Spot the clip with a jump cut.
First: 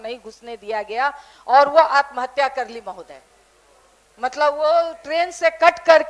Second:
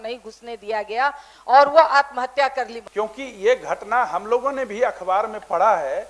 second; 1 cut; at 2.8 s

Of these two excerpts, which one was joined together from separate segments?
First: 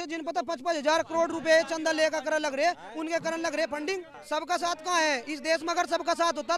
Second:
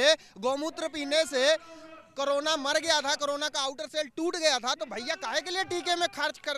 first; 1 cut; at 4.2 s

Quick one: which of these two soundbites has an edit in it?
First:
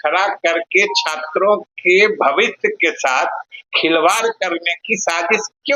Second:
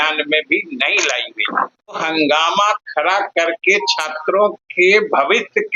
second; 1 cut; at 2.0 s

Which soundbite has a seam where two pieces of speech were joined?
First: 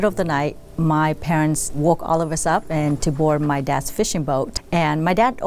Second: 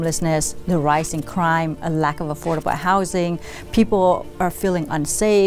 first; 3 cuts; at 1.7 s, 2.7 s, 4.6 s

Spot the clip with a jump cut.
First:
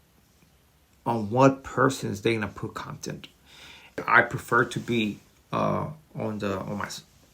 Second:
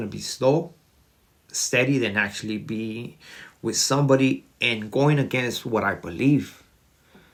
first; 1 cut; at 4.0 s

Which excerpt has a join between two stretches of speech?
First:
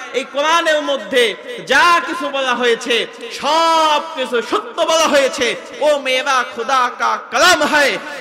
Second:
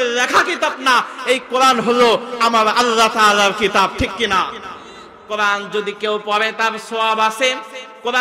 second; 1 cut; at 5.2 s

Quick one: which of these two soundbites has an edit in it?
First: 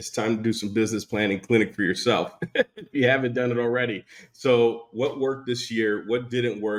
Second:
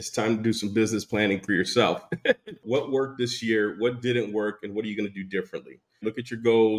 second; 3 cuts; at 1.4 s, 2.6 s, 6.0 s

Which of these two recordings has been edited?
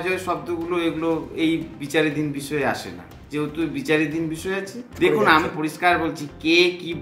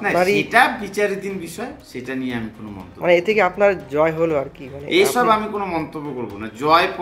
first; 1 cut; at 4.9 s

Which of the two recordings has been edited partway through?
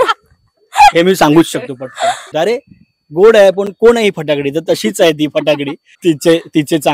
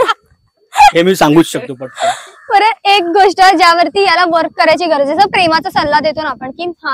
first; 2 cuts; at 2.3 s, 5.9 s

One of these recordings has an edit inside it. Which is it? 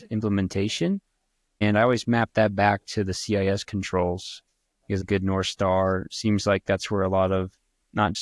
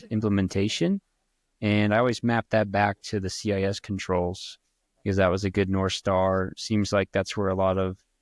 first; 2 cuts; at 1.6 s, 5.0 s

